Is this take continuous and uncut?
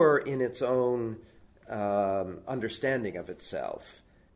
yes; 0 cuts

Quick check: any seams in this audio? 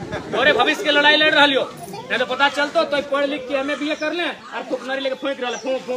no; 0 cuts

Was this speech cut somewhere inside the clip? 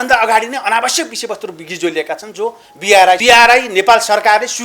yes; 1 cut; at 3.2 s

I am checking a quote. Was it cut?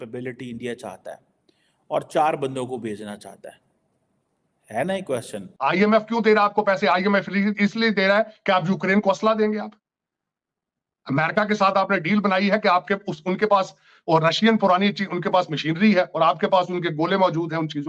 yes; 1 cut; at 5.4 s

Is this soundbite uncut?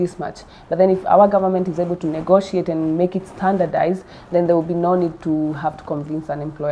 yes; 0 cuts

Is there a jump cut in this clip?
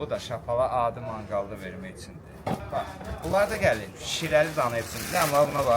yes; 1 cut; at 2.6 s

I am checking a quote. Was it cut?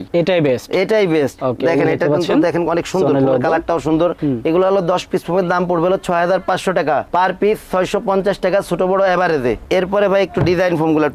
no; 0 cuts

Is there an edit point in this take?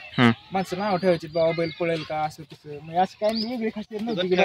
no; 0 cuts

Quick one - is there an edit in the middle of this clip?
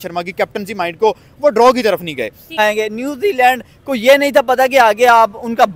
yes; 1 cut; at 2.6 s

